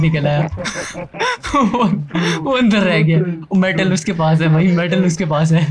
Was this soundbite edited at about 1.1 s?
no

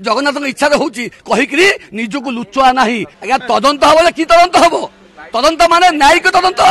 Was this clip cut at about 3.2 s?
yes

